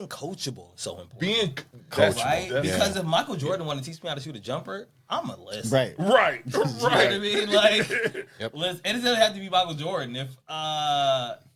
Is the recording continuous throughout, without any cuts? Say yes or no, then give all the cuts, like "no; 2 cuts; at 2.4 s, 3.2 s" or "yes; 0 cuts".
yes; 0 cuts